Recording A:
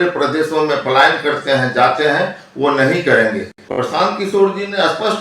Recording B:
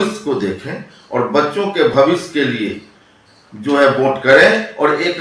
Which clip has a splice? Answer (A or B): A